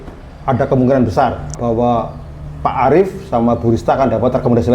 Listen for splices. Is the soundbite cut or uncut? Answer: cut